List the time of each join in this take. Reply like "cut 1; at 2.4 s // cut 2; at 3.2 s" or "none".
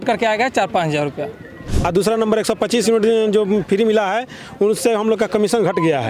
cut 1; at 1.7 s